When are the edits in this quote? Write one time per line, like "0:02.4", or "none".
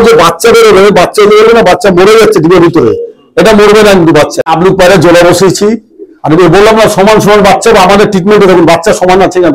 0:04.5